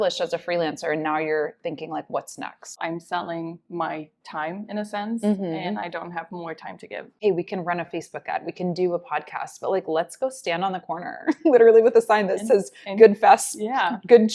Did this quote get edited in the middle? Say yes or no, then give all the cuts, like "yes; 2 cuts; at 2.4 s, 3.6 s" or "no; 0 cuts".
yes; 2 cuts; at 2.8 s, 7.1 s